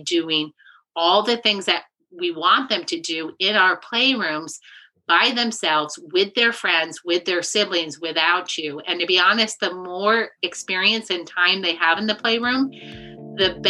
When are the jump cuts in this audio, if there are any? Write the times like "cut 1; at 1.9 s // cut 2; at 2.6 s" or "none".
none